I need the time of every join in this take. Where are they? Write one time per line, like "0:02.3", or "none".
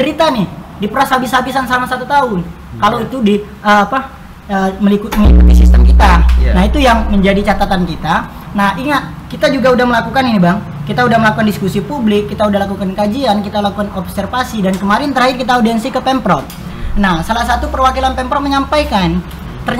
none